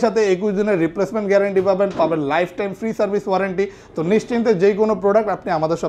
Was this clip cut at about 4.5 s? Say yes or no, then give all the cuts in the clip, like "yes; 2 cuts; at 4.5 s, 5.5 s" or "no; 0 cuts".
no; 0 cuts